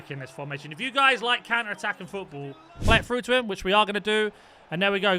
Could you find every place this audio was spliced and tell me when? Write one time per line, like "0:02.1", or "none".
0:02.8